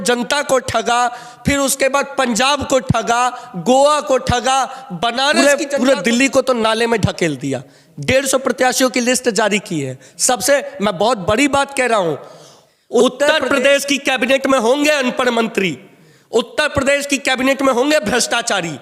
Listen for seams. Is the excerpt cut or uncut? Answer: cut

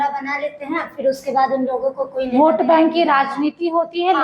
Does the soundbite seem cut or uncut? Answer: uncut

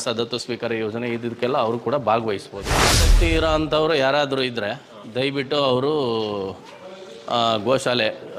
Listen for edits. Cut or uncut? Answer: cut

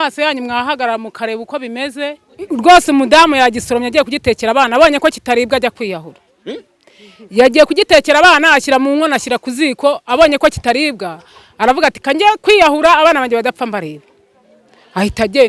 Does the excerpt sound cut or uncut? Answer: cut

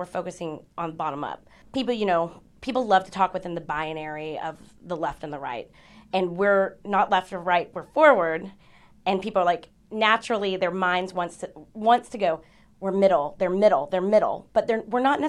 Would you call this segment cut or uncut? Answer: cut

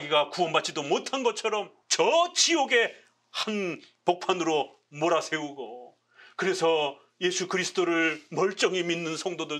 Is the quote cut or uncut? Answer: cut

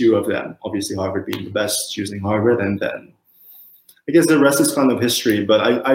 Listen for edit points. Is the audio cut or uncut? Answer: uncut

